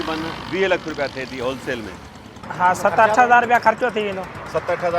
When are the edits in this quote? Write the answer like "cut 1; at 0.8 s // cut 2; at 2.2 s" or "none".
cut 1; at 2.4 s